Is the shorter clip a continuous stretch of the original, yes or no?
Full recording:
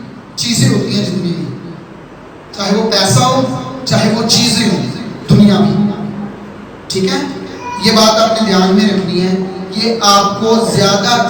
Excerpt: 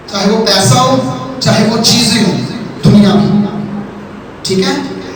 yes